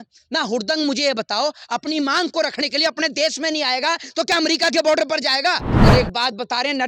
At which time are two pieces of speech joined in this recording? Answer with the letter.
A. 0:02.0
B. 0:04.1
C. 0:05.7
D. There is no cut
C